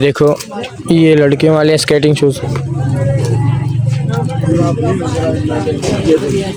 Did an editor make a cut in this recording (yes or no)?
no